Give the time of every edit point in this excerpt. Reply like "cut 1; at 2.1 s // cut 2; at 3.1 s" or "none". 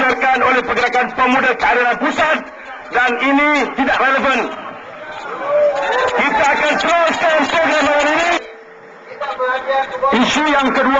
cut 1; at 8.4 s